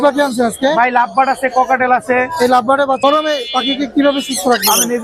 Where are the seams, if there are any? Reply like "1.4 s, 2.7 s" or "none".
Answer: 3.0 s